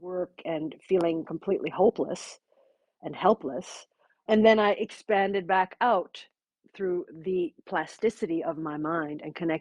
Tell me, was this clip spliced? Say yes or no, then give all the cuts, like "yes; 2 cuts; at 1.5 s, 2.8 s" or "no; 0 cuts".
yes; 1 cut; at 4.2 s